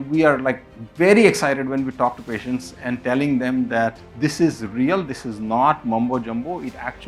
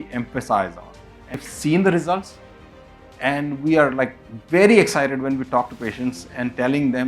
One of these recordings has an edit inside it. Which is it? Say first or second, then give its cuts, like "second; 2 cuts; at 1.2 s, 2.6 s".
second; 1 cut; at 1.4 s